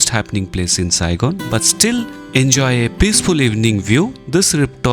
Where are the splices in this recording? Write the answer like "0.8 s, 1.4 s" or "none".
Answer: none